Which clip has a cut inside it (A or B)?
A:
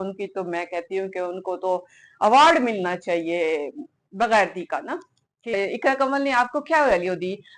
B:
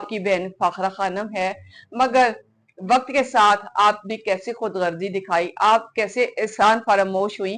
A